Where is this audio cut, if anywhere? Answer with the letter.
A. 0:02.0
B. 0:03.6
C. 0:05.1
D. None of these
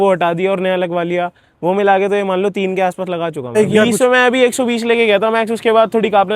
B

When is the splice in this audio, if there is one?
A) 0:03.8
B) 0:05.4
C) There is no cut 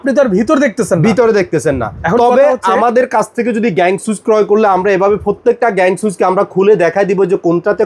C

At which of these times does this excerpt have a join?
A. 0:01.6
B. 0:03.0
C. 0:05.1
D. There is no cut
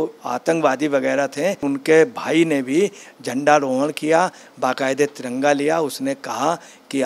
A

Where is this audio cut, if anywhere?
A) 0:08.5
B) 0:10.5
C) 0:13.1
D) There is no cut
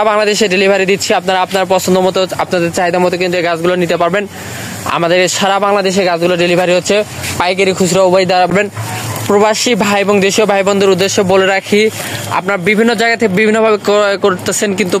A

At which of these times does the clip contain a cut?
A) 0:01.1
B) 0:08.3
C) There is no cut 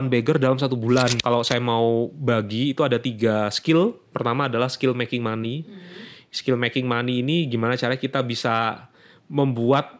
A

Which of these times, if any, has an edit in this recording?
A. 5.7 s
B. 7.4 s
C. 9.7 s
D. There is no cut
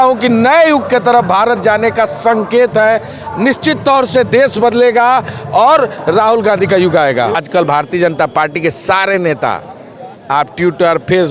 B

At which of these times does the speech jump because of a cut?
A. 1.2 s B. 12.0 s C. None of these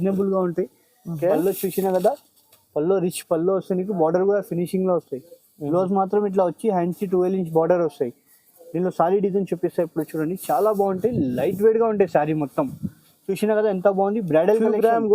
A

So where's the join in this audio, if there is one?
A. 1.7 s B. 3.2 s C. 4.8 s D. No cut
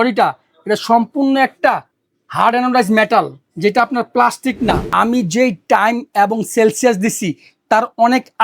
C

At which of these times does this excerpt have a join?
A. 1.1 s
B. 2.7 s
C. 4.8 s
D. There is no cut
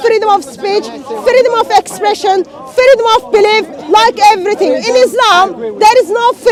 D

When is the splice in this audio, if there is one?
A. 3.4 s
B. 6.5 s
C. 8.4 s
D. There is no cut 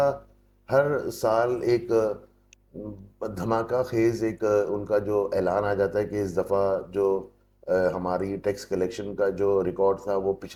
D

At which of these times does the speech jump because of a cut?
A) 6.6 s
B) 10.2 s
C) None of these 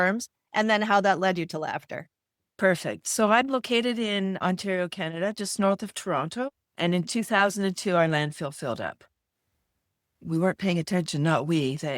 A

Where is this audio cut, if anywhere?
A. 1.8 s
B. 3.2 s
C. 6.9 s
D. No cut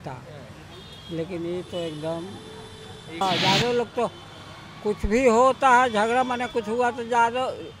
B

